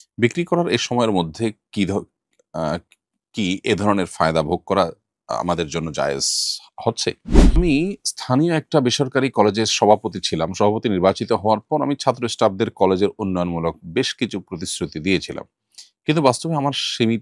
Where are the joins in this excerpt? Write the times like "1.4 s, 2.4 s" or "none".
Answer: 7.6 s